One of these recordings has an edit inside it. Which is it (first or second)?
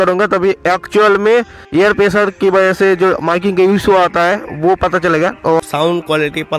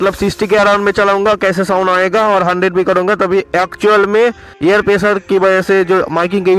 first